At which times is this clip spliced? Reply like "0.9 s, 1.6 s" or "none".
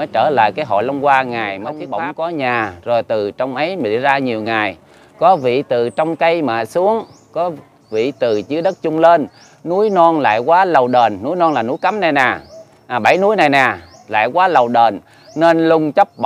1.8 s